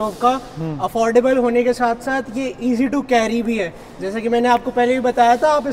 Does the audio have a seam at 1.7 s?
no; 0 cuts

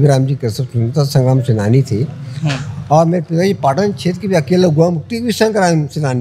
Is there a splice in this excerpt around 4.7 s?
no; 0 cuts

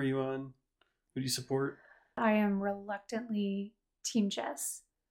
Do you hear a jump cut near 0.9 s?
no; 1 cut; at 2.2 s

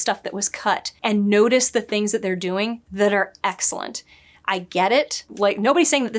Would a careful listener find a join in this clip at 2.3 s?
no; 2 cuts; at 0.9 s, 5.2 s

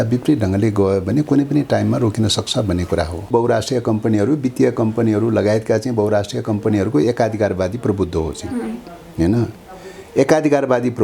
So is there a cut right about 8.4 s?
no; 1 cut; at 3.3 s

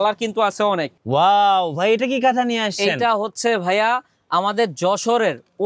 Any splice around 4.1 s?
no; 1 cut; at 0.9 s

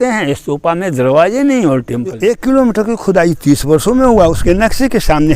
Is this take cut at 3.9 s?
no; 1 cut; at 2.2 s

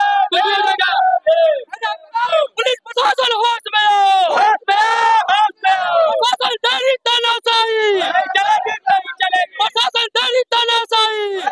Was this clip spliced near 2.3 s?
yes; 1 cut; at 2.3 s

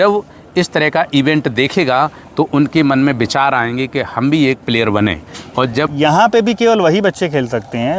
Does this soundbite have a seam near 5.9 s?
yes; 1 cut; at 5.9 s

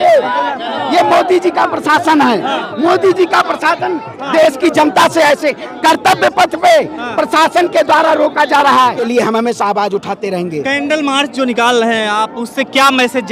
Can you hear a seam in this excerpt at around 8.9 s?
yes; 1 cut; at 8.9 s

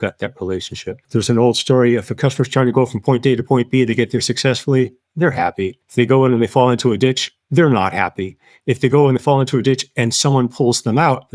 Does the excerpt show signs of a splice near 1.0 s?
yes; 2 cuts; at 1.0 s, 5.8 s

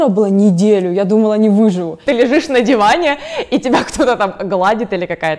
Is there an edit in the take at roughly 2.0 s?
yes; 1 cut; at 2.0 s

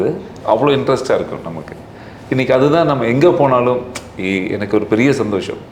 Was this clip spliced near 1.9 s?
no; 0 cuts

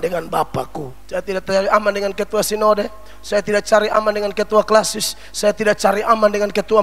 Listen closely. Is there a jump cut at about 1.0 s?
yes; 1 cut; at 1.0 s

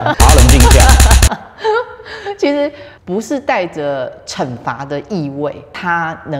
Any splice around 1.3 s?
no; 0 cuts

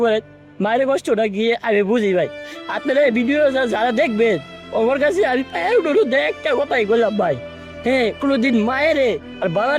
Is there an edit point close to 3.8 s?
no; 0 cuts

